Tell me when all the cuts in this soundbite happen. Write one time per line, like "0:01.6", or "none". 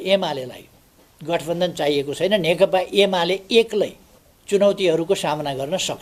none

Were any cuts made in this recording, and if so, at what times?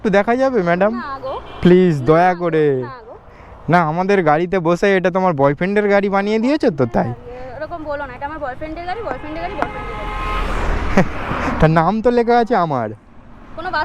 none

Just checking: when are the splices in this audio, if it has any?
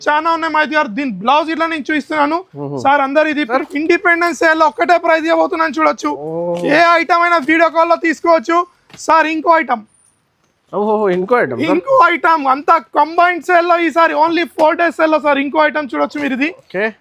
0:03.5

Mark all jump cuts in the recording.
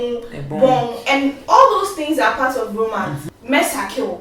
0:03.3

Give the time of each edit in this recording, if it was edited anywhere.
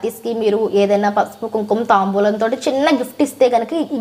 none

